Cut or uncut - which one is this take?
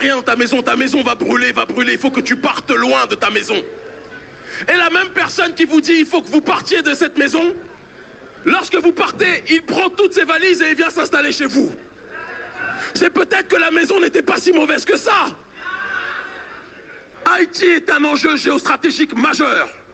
cut